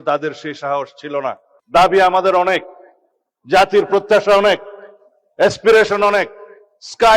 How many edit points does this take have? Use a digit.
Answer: 1